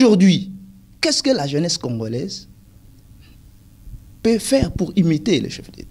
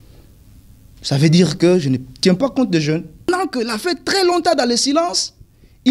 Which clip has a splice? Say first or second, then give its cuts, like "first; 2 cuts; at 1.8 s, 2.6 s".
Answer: second; 1 cut; at 3.3 s